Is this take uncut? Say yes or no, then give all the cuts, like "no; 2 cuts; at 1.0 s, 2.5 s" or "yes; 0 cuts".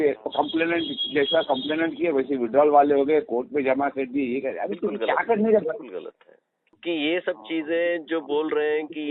no; 1 cut; at 6.7 s